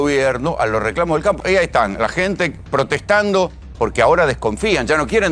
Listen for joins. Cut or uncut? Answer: cut